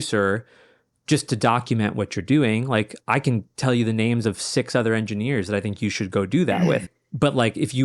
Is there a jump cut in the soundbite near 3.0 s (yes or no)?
no